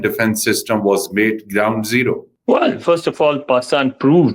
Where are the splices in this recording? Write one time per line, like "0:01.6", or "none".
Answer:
0:02.3